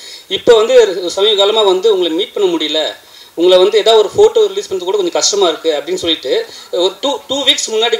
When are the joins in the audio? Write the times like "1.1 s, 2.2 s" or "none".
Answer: none